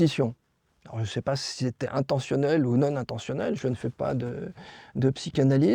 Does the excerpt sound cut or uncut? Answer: uncut